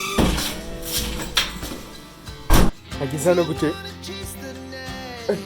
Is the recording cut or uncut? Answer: cut